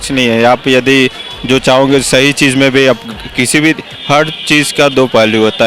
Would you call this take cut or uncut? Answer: uncut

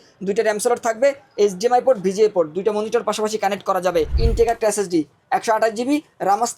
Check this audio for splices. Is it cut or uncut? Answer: cut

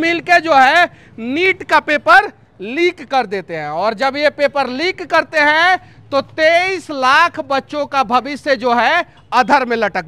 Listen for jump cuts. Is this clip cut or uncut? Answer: uncut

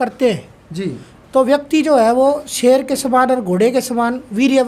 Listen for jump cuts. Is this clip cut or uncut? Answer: uncut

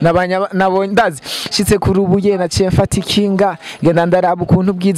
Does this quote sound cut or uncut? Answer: uncut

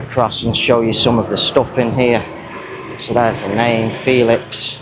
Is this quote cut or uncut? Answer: uncut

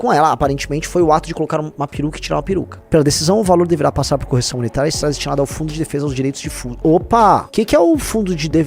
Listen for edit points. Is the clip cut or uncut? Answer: cut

